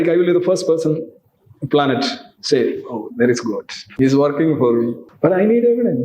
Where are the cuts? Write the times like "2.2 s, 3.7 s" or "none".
3.8 s, 5.0 s